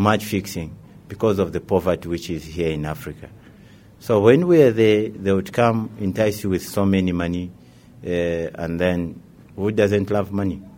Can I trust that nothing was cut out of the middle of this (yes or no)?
no